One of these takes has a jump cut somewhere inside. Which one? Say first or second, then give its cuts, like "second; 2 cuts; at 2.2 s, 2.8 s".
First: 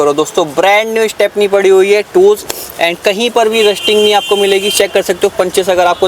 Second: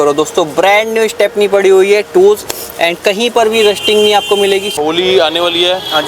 second; 1 cut; at 4.7 s